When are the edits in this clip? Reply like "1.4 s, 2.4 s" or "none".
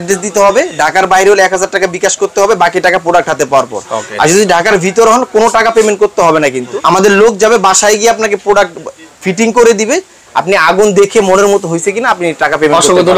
6.7 s